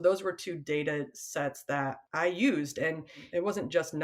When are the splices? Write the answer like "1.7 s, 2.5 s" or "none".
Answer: 2.0 s, 3.2 s